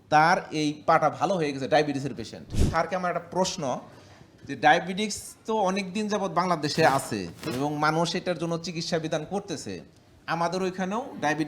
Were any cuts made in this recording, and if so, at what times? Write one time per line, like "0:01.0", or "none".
0:02.7